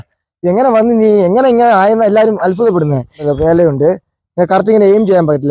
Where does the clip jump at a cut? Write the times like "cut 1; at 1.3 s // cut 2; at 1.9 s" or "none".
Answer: cut 1; at 3.2 s